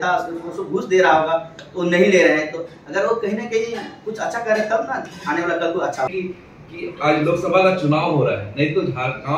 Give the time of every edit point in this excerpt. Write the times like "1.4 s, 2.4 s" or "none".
6.1 s